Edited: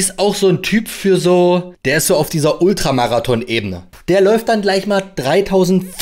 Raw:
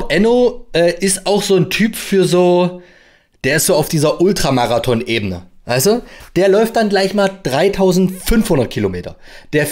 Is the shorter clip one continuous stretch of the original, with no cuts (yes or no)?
no